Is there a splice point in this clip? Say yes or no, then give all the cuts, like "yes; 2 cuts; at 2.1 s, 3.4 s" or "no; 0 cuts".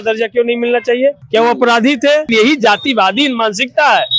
yes; 2 cuts; at 1.2 s, 2.3 s